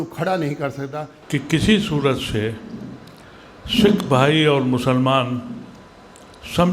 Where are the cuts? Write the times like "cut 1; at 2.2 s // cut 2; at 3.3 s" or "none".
cut 1; at 1.1 s